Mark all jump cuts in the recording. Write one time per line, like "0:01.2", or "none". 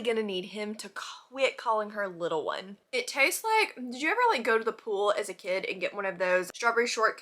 0:02.7